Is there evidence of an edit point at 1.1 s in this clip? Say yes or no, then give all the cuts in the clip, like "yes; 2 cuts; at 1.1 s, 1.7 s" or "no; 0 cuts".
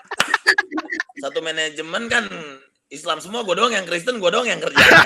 yes; 1 cut; at 1.1 s